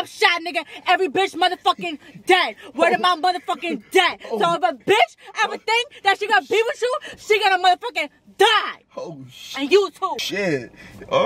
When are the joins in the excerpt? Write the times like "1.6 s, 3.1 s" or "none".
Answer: none